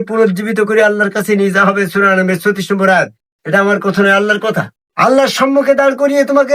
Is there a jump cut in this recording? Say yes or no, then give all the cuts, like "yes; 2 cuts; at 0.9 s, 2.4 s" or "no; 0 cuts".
yes; 1 cut; at 4.8 s